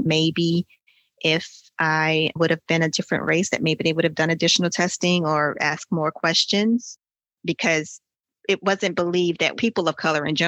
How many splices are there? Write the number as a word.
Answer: three